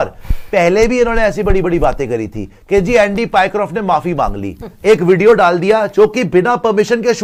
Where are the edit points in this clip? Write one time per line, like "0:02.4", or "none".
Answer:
none